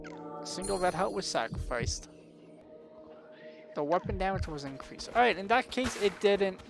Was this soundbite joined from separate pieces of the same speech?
yes; 1 cut; at 2.6 s

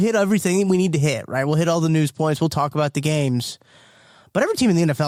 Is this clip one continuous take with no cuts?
yes; 0 cuts

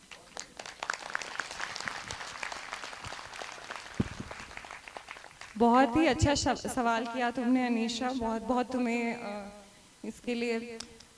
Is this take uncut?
yes; 0 cuts

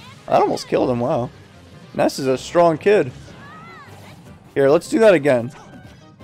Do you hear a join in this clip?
no; 0 cuts

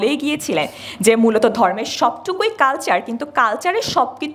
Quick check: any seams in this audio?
no; 0 cuts

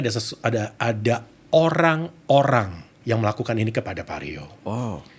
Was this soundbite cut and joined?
yes; 1 cut; at 2.9 s

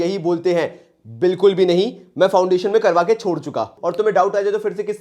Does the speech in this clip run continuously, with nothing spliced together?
no; 1 cut; at 3.8 s

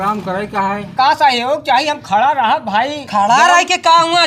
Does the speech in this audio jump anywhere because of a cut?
yes; 1 cut; at 1.1 s

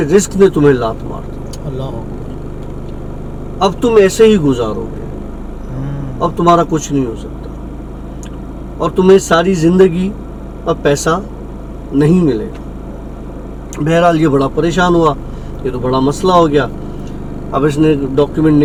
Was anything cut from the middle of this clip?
no; 0 cuts

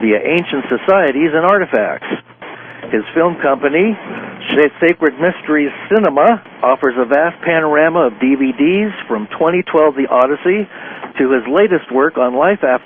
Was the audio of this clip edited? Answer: yes; 1 cut; at 8.7 s

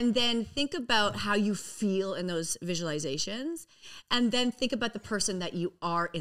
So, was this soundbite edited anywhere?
no; 0 cuts

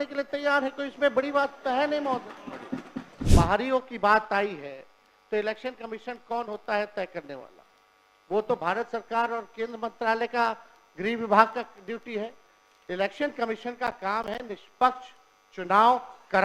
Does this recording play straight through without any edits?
no; 1 cut; at 3.2 s

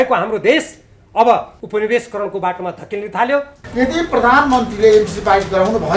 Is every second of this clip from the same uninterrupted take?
no; 2 cuts; at 1.6 s, 3.6 s

